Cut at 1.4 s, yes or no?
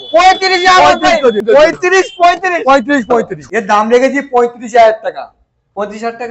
yes